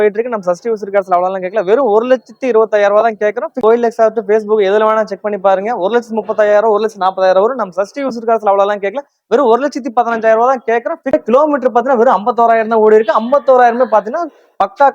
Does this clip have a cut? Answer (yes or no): yes